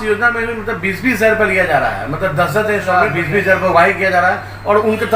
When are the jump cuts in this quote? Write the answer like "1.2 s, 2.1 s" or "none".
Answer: 3.0 s